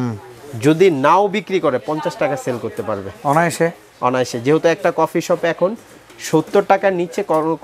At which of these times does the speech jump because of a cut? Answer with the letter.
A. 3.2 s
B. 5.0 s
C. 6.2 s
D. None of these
D